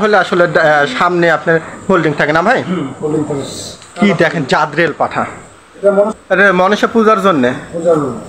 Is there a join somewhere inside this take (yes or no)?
yes